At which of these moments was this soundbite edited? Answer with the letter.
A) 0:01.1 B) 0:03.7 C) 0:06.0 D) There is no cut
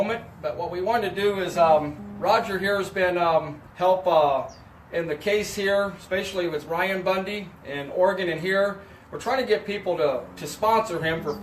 D